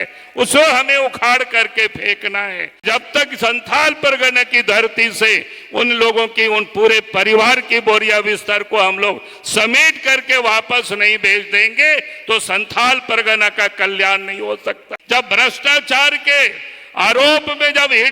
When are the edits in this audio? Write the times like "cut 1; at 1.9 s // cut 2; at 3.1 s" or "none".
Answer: cut 1; at 2.8 s // cut 2; at 14.9 s